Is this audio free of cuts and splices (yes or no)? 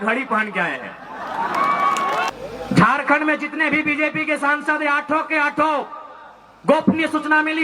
no